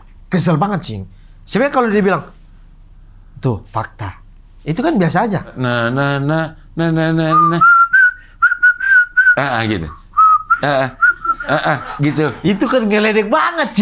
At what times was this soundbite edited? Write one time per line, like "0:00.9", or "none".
0:05.6